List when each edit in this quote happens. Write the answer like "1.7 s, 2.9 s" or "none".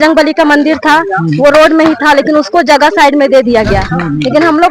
none